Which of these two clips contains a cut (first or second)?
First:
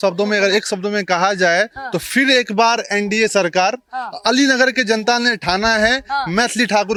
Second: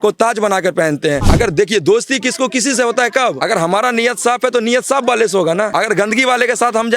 second